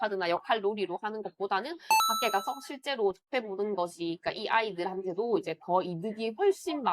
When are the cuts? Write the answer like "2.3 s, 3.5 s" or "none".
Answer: none